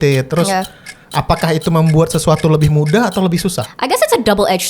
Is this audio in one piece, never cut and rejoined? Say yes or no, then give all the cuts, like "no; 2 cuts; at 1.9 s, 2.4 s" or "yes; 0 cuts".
no; 1 cut; at 3.7 s